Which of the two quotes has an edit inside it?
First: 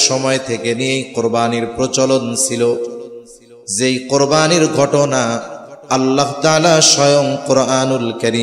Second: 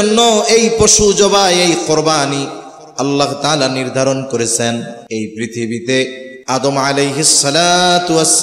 second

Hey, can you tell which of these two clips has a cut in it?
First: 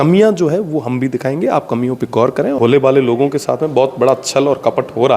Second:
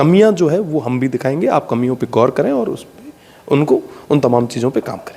first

